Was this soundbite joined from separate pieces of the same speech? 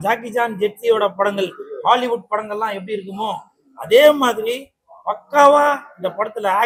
no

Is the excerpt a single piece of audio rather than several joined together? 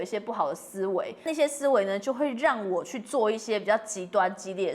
no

